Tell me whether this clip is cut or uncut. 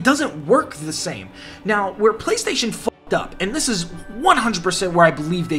uncut